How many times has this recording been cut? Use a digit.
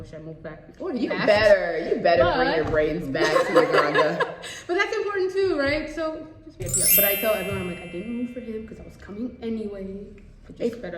1